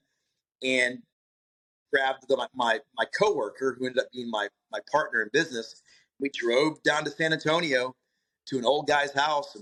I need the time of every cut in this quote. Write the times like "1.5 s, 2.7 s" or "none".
none